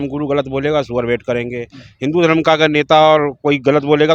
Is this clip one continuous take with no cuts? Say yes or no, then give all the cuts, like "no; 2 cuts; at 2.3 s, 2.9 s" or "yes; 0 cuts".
yes; 0 cuts